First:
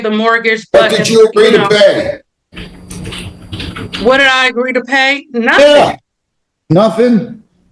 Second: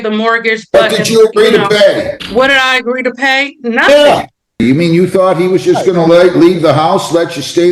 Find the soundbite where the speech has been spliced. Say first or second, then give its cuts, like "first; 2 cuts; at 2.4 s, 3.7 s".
second; 2 cuts; at 2.2 s, 4.6 s